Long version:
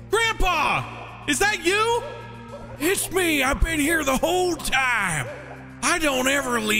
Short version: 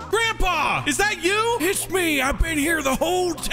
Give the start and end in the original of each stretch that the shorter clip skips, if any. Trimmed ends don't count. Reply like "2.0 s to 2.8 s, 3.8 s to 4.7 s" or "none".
0.8 s to 1.2 s, 2.0 s to 2.8 s